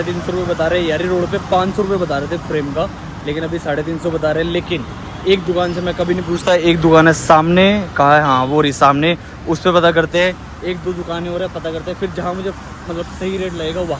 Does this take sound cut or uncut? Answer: uncut